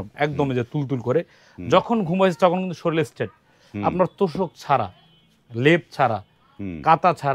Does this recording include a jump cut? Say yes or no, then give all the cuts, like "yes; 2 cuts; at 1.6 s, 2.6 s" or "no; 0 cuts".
no; 0 cuts